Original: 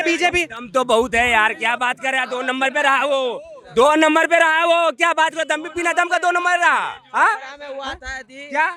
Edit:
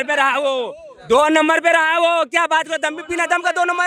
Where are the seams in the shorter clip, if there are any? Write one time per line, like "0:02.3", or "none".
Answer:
none

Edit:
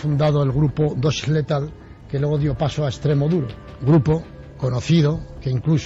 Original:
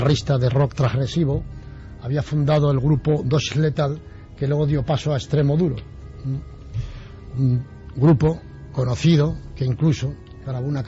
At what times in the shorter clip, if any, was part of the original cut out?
0:03.6

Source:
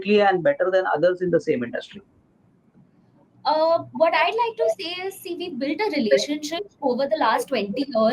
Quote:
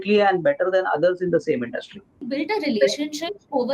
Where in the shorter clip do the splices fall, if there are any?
0:02.2

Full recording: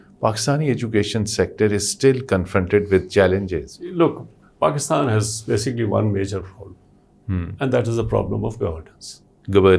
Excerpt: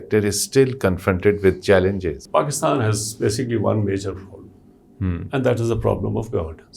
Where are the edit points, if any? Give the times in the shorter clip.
0:02.2

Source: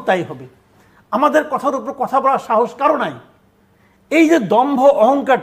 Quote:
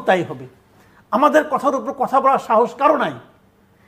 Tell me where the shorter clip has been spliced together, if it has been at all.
none

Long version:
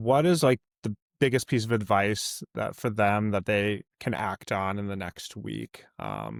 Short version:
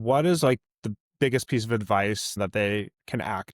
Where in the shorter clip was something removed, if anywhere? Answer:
0:02.4

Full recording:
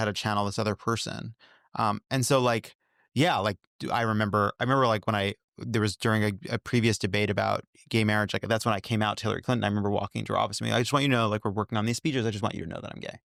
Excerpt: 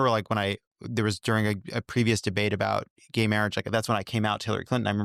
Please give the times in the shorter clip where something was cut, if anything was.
none

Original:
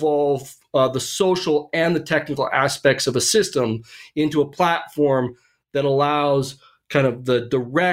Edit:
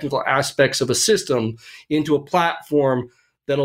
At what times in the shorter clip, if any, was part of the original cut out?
none

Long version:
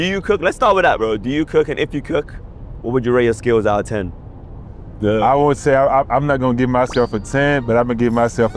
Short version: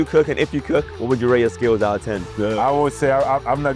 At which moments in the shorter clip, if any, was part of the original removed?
0:00.9
0:02.2

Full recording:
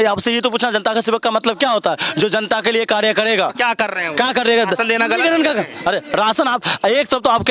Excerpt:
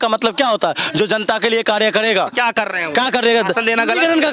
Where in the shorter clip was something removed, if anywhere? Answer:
none

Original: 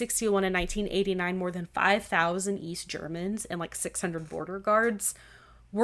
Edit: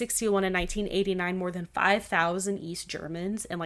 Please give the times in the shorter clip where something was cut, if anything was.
none

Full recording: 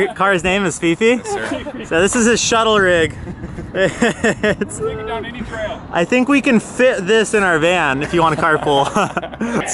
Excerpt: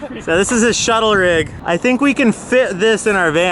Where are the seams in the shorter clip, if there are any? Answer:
0:01.6

